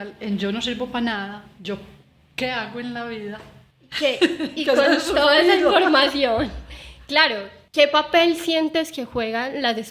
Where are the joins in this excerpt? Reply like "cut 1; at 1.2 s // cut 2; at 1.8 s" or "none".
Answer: none